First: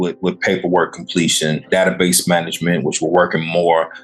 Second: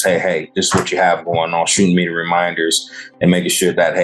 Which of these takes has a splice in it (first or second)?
first